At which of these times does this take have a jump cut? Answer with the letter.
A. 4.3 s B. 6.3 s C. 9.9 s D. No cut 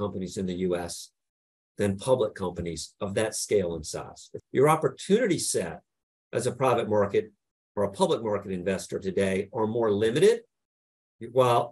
A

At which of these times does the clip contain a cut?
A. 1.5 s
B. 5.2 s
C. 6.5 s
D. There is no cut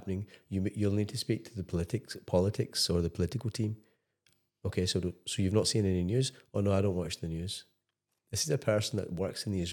D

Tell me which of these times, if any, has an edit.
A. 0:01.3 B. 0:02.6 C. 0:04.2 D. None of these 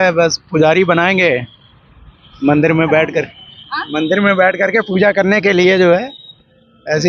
D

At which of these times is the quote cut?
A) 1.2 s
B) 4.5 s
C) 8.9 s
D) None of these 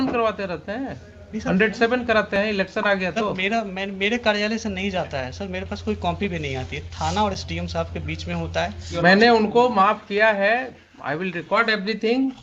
C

